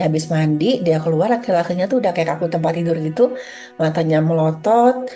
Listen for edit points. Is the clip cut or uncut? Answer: uncut